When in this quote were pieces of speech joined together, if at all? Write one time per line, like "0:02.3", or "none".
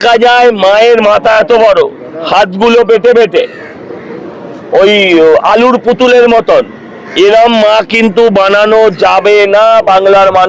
none